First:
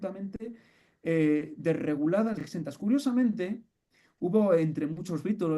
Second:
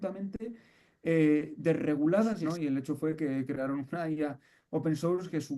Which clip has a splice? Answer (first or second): second